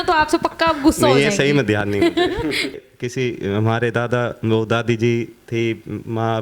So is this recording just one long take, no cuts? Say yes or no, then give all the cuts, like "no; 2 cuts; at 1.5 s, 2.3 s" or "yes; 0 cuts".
no; 1 cut; at 2.7 s